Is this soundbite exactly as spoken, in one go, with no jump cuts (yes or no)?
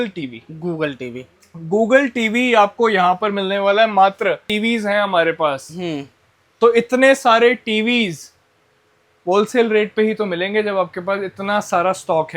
no